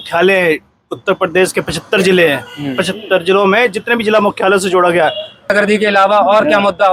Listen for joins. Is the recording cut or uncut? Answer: cut